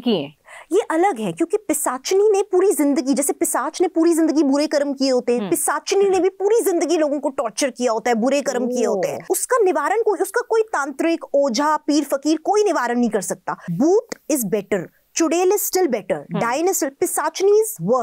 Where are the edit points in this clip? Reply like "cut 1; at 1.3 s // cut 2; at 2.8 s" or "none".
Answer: cut 1; at 9.2 s // cut 2; at 13.6 s